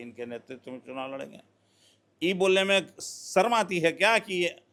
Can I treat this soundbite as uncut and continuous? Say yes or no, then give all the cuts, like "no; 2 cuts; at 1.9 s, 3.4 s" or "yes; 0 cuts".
yes; 0 cuts